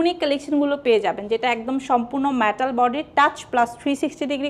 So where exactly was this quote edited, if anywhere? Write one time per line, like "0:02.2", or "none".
none